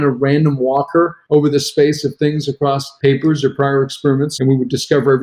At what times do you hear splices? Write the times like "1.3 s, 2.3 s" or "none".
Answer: 1.2 s, 2.9 s, 4.3 s